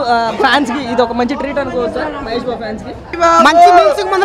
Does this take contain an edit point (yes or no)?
yes